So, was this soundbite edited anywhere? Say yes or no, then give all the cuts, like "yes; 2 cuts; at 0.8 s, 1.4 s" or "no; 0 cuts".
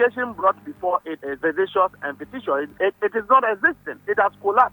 yes; 2 cuts; at 1.2 s, 2.7 s